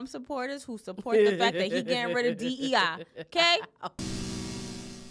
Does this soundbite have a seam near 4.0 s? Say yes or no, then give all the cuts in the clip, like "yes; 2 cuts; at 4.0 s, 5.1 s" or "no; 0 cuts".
yes; 1 cut; at 4.0 s